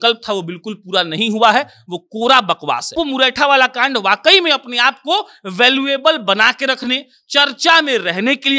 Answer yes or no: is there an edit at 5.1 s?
no